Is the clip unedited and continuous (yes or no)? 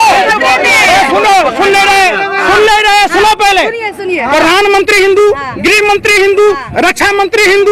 yes